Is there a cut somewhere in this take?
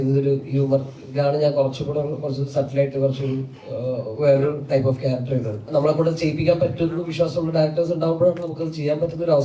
yes; 1 cut; at 5.7 s

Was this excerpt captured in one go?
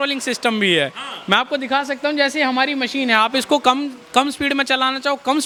yes; 0 cuts

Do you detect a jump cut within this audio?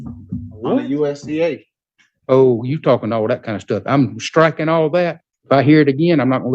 yes; 1 cut; at 5.3 s

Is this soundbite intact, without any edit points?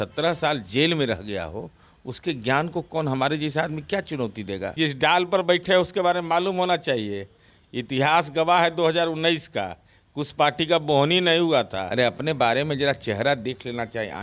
no; 2 cuts; at 4.7 s, 11.8 s

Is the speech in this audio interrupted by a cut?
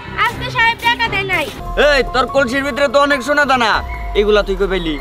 yes; 1 cut; at 1.6 s

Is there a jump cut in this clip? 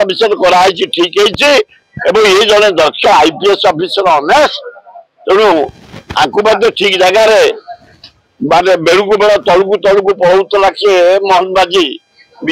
no; 0 cuts

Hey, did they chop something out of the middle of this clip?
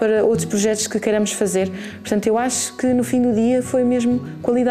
no; 0 cuts

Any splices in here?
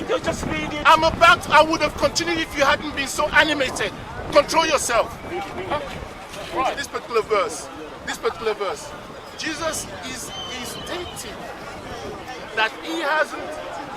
yes; 1 cut; at 6.8 s

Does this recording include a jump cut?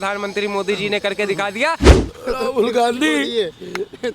yes; 1 cut; at 1.8 s

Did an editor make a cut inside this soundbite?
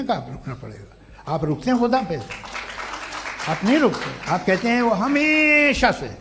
no; 0 cuts

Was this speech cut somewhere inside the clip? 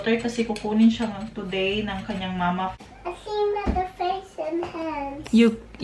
yes; 1 cut; at 2.8 s

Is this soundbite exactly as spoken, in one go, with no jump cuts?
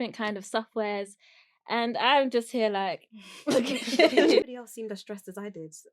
no; 1 cut; at 4.5 s

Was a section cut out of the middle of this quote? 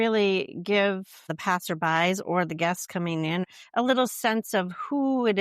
yes; 2 cuts; at 1.3 s, 3.5 s

